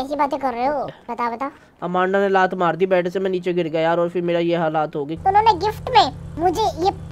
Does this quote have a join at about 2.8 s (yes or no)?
no